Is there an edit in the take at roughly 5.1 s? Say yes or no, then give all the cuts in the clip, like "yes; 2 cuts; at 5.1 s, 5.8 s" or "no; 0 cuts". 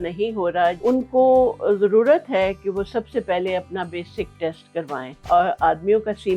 yes; 2 cuts; at 0.8 s, 5.1 s